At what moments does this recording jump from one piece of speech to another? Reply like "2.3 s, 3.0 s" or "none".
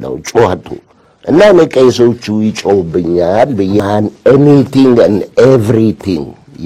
3.8 s